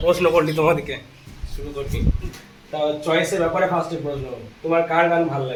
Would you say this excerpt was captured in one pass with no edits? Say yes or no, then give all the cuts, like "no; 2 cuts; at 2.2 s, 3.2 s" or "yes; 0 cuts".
yes; 0 cuts